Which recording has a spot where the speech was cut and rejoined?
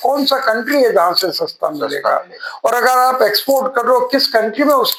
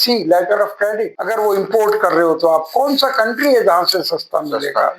second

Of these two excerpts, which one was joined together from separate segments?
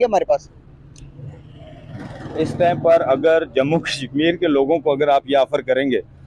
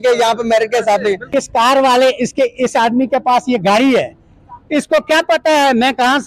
second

